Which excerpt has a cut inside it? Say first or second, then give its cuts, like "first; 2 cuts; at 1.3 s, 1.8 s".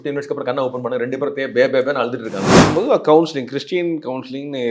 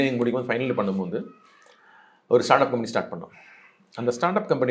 first; 1 cut; at 2.6 s